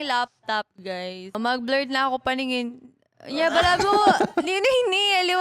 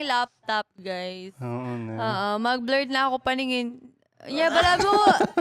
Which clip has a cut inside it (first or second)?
first